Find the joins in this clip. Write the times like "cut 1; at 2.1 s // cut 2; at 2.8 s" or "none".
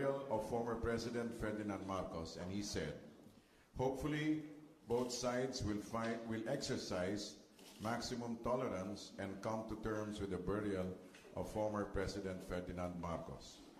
none